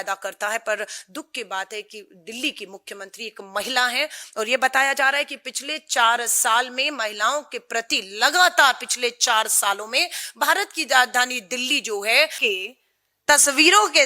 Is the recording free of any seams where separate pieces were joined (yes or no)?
no